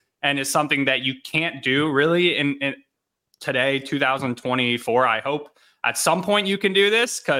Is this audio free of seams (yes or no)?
yes